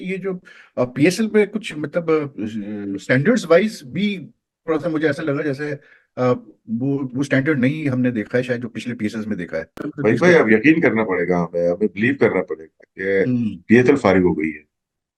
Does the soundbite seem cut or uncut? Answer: uncut